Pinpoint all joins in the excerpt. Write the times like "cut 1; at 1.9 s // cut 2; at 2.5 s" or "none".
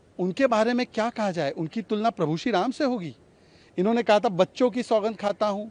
none